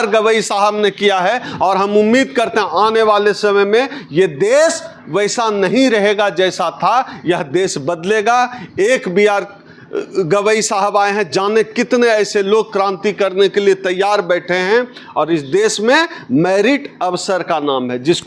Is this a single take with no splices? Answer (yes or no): yes